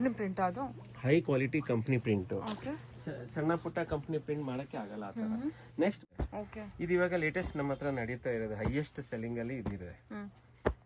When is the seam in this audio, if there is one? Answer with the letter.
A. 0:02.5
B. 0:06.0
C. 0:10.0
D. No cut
B